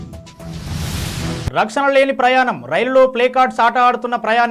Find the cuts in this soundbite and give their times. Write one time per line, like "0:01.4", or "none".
0:01.5